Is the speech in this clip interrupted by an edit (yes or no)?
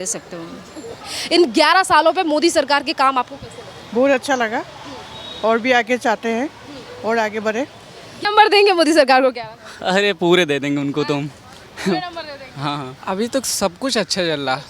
yes